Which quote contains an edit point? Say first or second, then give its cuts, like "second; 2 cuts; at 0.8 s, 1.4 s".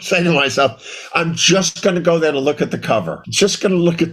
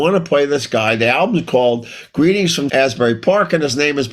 first; 1 cut; at 3.2 s